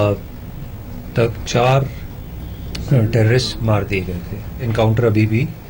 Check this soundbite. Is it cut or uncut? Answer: cut